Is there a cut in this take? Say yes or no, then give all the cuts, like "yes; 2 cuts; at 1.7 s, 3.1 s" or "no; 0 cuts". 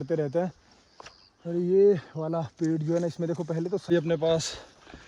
yes; 1 cut; at 3.9 s